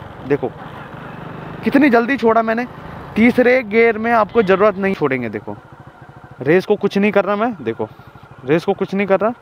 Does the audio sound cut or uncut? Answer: cut